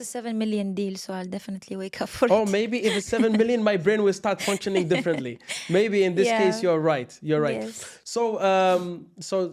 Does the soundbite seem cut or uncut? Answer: uncut